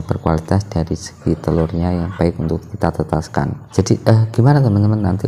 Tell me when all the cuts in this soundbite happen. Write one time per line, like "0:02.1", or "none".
0:03.6